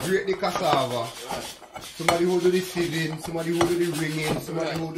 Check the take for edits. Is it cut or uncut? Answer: uncut